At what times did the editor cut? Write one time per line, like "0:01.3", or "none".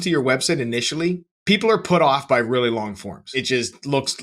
0:01.3
0:03.3